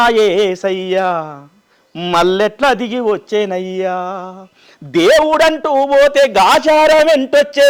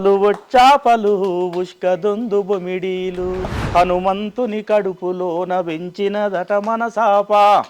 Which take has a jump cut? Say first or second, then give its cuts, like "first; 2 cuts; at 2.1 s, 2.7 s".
second; 1 cut; at 3.6 s